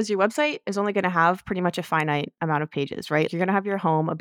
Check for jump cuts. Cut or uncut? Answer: cut